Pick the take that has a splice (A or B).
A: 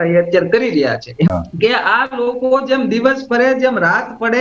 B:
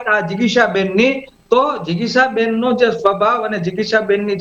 A